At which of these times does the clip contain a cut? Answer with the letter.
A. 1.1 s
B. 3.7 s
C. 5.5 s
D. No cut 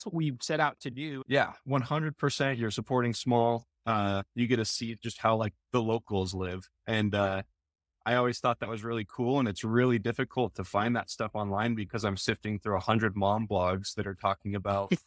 A